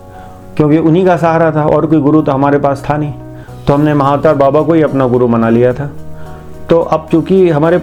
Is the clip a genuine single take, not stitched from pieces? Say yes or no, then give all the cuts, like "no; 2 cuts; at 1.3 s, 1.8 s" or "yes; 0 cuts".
yes; 0 cuts